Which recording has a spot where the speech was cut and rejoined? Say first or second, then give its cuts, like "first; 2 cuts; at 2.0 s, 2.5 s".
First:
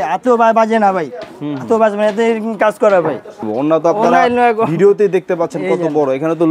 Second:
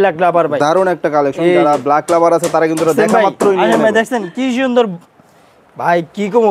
first; 1 cut; at 3.5 s